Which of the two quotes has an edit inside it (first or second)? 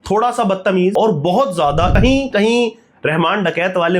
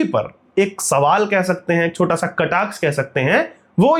first